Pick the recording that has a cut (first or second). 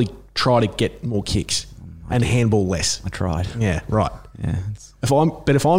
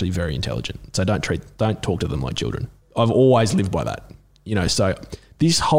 second